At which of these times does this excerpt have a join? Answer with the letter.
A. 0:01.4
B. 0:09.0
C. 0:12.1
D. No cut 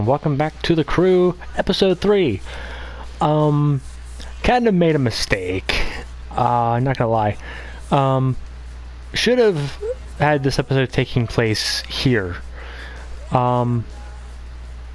A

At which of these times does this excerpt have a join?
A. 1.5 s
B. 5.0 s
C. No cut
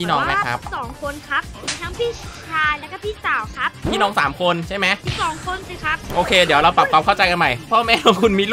A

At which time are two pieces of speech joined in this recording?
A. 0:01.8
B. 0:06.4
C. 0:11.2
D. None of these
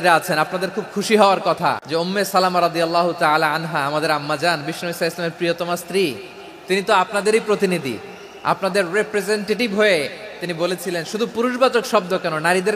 A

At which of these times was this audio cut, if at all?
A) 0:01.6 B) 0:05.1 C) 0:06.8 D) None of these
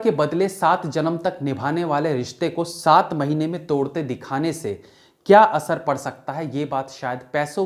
D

